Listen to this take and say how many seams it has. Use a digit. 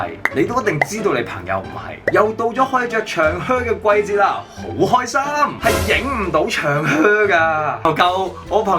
3